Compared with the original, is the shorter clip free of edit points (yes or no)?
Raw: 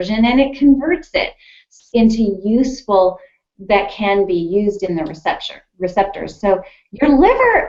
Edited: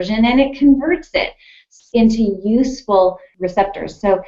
no